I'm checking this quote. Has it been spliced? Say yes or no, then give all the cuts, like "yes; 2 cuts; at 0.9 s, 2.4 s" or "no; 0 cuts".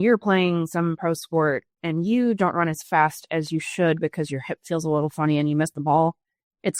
no; 0 cuts